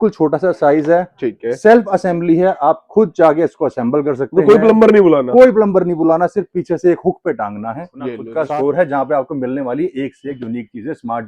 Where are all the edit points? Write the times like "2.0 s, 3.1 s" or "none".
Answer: 8.2 s